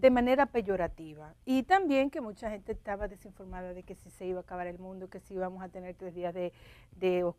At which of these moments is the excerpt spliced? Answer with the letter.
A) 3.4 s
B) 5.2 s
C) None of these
C